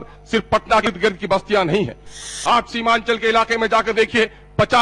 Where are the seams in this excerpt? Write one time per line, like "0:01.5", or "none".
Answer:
0:00.9
0:02.2